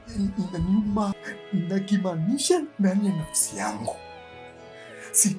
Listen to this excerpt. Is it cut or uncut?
cut